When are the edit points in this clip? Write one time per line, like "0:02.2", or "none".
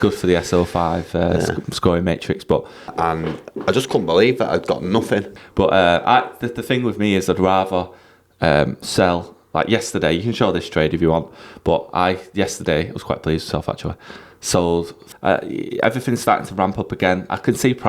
0:02.9
0:05.3
0:15.0